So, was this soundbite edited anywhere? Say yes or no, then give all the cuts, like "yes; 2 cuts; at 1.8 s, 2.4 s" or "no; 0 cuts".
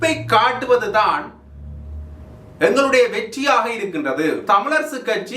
yes; 1 cut; at 4.4 s